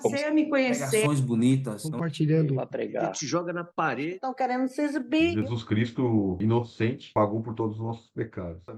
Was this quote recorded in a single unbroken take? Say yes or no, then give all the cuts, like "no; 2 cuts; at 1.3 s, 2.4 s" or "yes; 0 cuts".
yes; 0 cuts